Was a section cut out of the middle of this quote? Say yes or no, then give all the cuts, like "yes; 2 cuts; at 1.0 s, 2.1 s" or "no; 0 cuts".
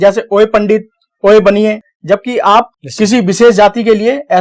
yes; 2 cuts; at 1.8 s, 2.8 s